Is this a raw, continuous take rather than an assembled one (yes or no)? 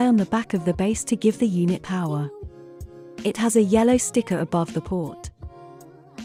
yes